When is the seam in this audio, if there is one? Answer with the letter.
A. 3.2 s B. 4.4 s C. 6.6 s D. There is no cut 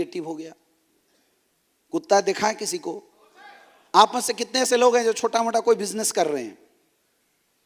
D